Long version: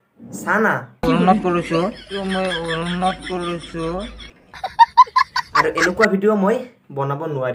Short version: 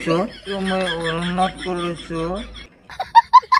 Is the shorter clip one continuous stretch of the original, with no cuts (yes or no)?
yes